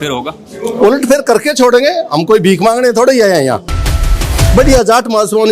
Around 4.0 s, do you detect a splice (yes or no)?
yes